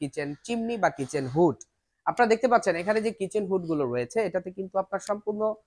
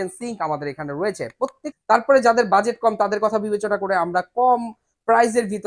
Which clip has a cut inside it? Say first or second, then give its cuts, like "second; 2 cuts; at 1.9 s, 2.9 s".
second; 1 cut; at 1.6 s